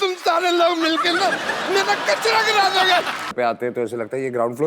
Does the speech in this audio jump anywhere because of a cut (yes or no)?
yes